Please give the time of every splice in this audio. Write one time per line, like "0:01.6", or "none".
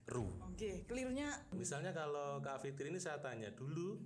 0:01.5